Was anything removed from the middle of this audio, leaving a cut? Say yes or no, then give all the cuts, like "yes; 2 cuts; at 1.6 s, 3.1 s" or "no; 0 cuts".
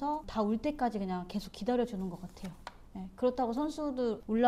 no; 0 cuts